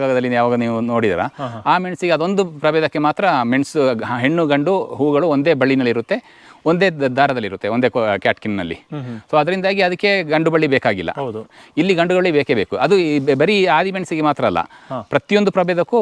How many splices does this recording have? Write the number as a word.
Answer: zero